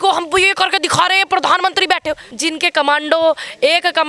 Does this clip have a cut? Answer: yes; 1 cut; at 2.3 s

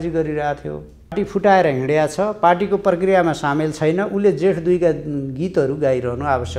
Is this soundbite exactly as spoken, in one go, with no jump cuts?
no; 1 cut; at 1.2 s

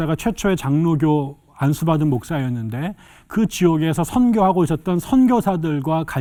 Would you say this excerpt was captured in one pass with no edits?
yes; 0 cuts

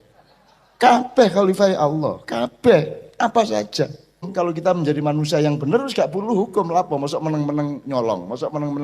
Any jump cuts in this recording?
yes; 1 cut; at 4.3 s

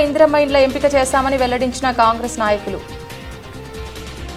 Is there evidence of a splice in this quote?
no; 0 cuts

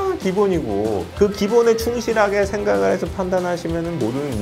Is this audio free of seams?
no; 1 cut; at 1.1 s

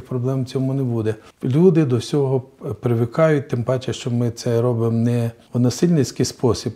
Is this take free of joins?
no; 2 cuts; at 1.3 s, 5.4 s

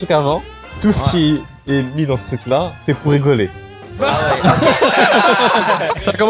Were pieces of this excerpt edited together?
no; 0 cuts

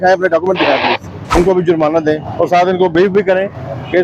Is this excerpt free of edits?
no; 1 cut; at 1.1 s

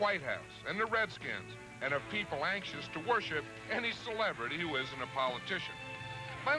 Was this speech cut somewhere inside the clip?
no; 0 cuts

